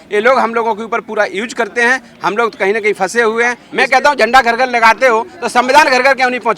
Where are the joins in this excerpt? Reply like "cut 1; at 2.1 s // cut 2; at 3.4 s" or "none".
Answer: cut 1; at 3.6 s